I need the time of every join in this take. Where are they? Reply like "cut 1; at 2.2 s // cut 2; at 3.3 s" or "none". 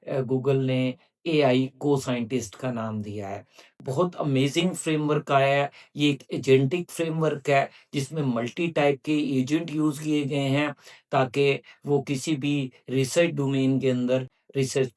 cut 1; at 3.7 s